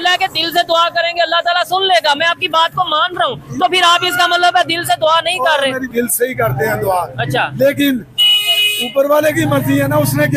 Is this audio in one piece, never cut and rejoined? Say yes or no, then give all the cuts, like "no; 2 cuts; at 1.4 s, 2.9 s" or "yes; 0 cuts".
no; 1 cut; at 5.9 s